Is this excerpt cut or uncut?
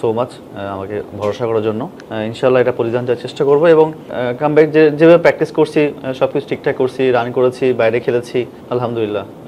cut